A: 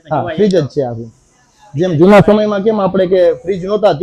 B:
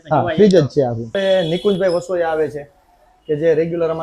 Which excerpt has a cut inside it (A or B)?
B